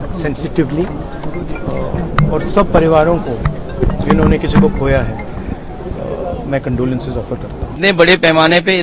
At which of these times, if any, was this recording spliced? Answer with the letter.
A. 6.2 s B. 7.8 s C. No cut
B